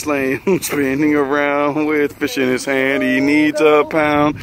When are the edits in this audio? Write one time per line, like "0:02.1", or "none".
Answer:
none